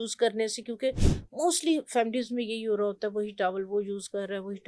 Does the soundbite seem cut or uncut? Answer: uncut